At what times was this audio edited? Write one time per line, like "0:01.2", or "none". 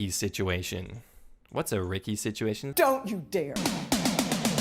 0:02.7
0:03.6